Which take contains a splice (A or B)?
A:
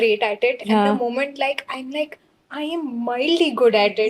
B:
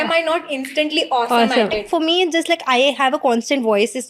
B